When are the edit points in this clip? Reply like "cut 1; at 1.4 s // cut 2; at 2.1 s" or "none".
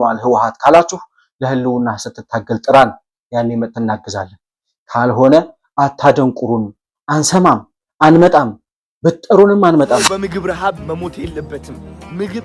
cut 1; at 10.1 s